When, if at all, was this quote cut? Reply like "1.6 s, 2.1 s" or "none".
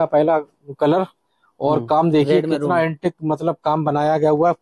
none